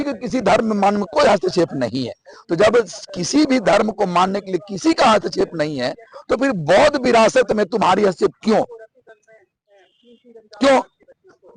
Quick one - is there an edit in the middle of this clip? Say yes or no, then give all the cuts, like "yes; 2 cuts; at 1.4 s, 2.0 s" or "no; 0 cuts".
no; 0 cuts